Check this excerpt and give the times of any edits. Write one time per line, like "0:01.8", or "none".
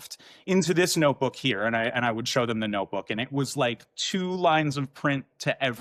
none

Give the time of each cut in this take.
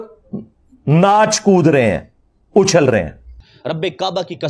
0:03.5

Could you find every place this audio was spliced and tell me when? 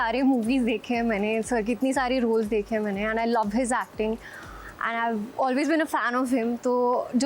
none

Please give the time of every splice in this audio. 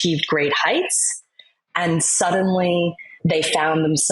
0:03.1

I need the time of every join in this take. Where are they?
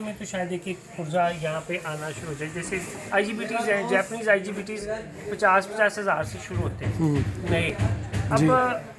none

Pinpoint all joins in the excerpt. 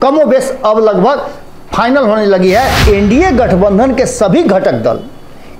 0:02.8

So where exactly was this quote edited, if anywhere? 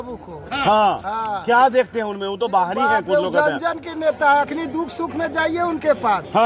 none

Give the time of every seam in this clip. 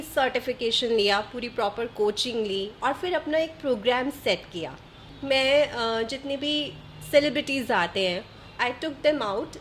0:05.1
0:08.4

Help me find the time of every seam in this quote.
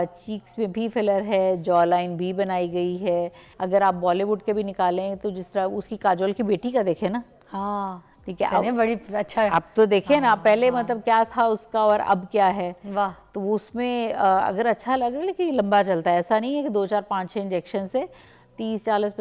0:03.4

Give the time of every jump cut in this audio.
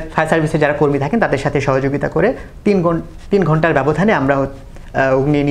none

